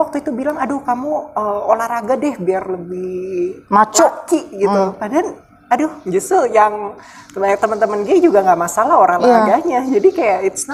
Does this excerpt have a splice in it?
no; 0 cuts

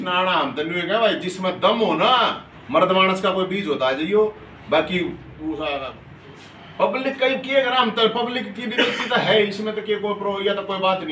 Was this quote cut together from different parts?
yes; 1 cut; at 6.1 s

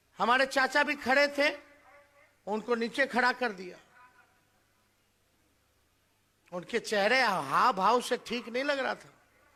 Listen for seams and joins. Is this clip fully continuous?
yes; 0 cuts

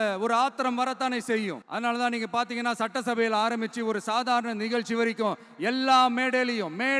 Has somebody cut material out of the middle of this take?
yes; 1 cut; at 1.6 s

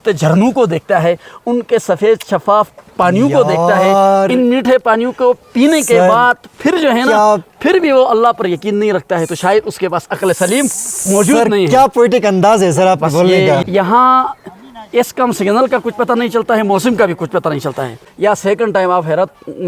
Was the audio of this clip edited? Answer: yes; 2 cuts; at 13.6 s, 18.0 s

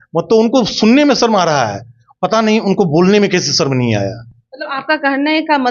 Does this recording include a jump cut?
no; 0 cuts

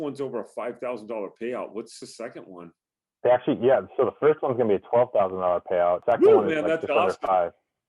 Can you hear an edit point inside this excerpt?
yes; 2 cuts; at 2.0 s, 6.0 s

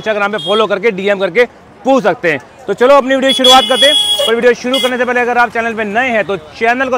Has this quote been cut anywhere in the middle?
no; 0 cuts

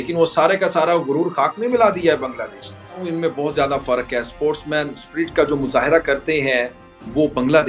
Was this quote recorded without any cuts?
no; 1 cut; at 3.0 s

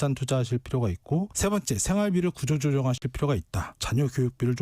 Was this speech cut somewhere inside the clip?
yes; 1 cut; at 1.3 s

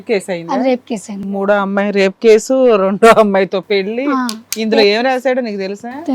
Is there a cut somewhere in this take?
yes; 1 cut; at 1.2 s

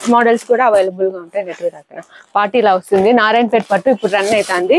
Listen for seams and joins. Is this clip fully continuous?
yes; 0 cuts

